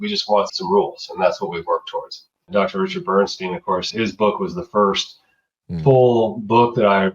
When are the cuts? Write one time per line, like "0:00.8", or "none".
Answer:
0:02.5
0:03.9